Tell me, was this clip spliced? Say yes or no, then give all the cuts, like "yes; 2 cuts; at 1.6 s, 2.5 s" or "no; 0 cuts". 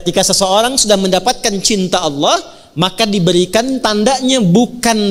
no; 0 cuts